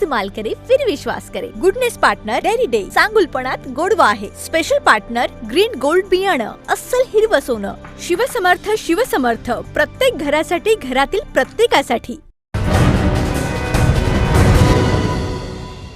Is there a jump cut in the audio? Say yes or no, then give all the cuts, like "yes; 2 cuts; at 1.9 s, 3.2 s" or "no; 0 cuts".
yes; 1 cut; at 12.5 s